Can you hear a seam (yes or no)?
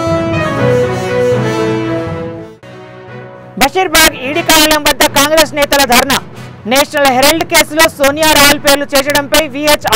no